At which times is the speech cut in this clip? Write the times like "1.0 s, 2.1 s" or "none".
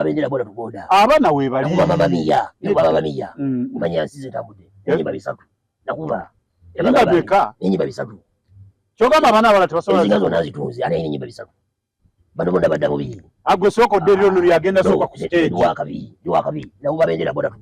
none

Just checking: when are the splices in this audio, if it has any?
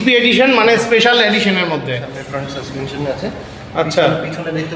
2.3 s

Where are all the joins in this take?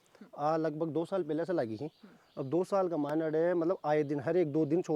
none

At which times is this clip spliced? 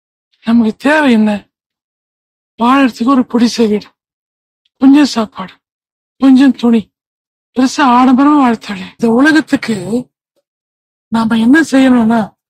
9.0 s

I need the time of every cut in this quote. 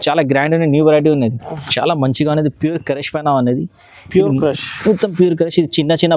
1.7 s

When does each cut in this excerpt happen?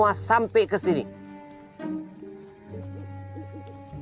2.8 s

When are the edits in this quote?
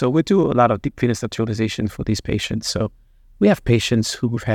none

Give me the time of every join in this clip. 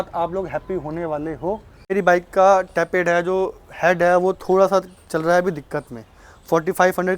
1.9 s

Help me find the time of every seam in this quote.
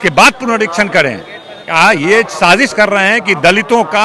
none

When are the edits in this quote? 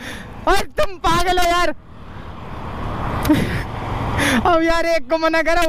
none

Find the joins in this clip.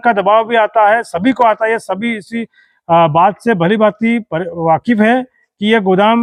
none

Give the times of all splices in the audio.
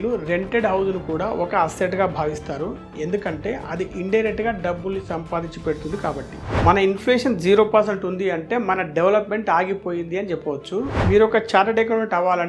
6.5 s, 11.0 s

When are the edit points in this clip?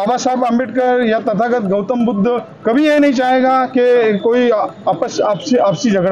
none

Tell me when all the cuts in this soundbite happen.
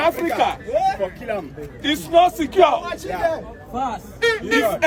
none

